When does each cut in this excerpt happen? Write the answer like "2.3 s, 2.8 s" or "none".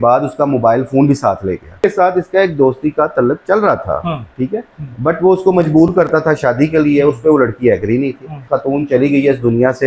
1.8 s, 8.5 s